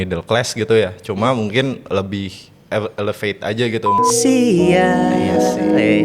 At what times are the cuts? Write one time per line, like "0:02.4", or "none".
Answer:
0:04.0